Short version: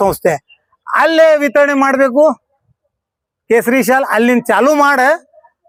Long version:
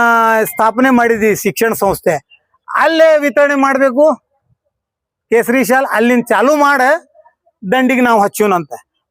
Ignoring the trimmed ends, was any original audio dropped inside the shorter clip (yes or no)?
no